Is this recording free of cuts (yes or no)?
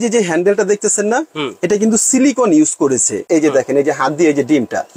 no